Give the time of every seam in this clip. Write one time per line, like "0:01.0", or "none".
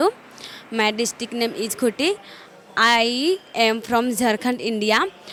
none